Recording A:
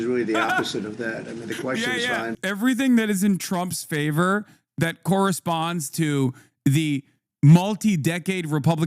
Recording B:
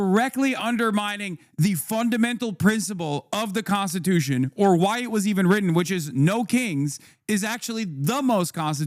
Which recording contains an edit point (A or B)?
A